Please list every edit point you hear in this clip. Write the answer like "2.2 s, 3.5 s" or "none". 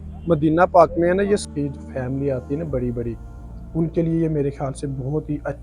1.5 s